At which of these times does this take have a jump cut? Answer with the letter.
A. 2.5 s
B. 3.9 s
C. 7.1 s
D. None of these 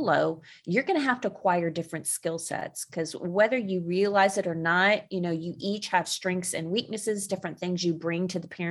D